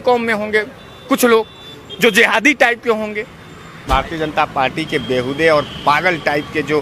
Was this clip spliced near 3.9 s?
yes; 1 cut; at 3.9 s

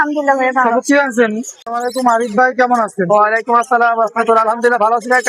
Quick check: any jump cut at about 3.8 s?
no; 1 cut; at 1.7 s

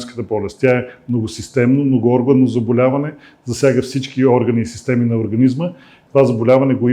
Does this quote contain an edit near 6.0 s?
yes; 1 cut; at 6.0 s

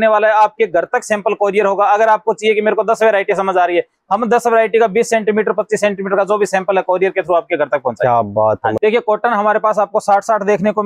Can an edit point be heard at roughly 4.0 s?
no; 1 cut; at 8.8 s

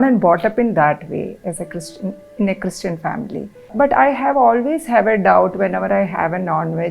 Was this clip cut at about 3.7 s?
yes; 1 cut; at 3.7 s

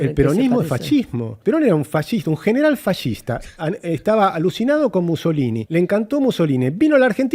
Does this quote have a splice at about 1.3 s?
yes; 2 cuts; at 1.3 s, 5.6 s

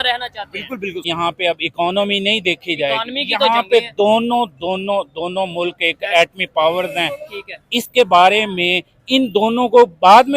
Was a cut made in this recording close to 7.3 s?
no; 1 cut; at 1.1 s

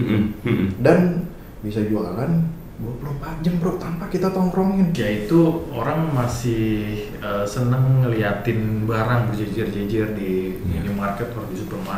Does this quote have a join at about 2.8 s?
no; 1 cut; at 5.0 s

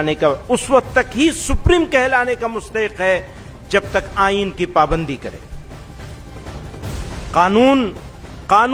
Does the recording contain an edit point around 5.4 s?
no; 0 cuts

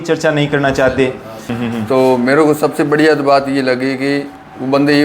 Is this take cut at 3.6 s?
no; 1 cut; at 1.4 s

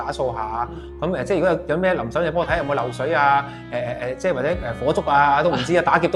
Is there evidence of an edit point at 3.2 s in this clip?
no; 0 cuts

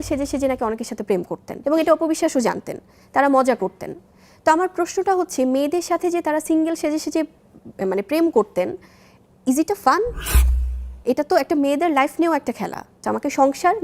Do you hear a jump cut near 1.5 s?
yes; 2 cuts; at 1.5 s, 13.0 s

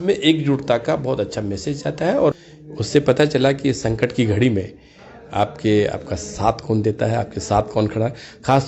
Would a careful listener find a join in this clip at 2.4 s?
yes; 1 cut; at 2.4 s

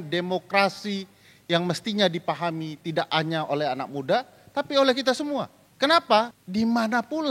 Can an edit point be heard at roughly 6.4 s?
yes; 2 cuts; at 5.6 s, 6.4 s

